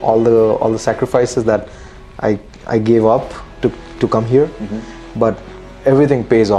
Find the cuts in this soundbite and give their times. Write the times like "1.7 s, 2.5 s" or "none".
none